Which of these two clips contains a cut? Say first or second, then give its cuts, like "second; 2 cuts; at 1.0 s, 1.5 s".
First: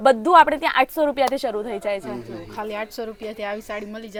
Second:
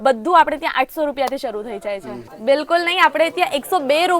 second; 1 cut; at 2.2 s